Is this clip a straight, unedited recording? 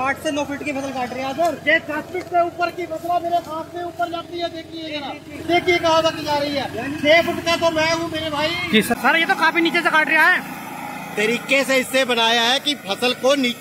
no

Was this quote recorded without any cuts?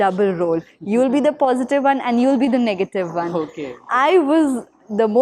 yes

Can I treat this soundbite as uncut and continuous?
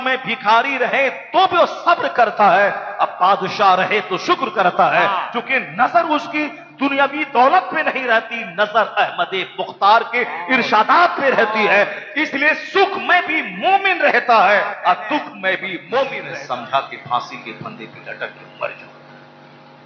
no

